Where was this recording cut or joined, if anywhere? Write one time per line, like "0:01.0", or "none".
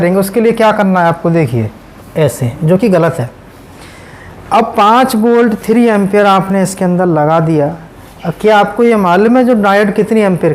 0:02.0

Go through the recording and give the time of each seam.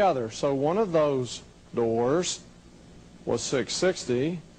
none

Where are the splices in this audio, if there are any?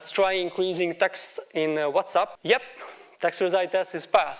0:02.4

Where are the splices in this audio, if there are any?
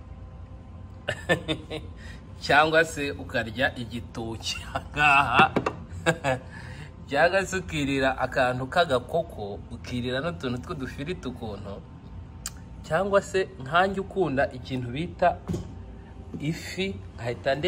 none

